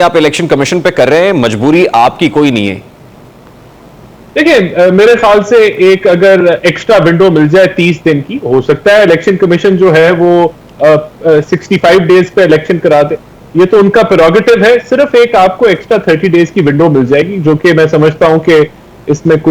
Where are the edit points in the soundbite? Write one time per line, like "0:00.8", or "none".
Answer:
none